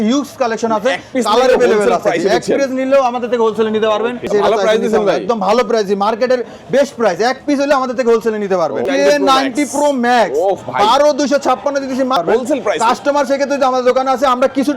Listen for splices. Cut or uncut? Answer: cut